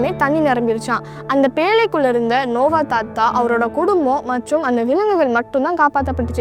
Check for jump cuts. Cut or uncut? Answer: uncut